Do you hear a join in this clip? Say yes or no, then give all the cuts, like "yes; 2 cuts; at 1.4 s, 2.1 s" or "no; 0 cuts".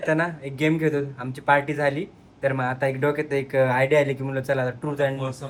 no; 0 cuts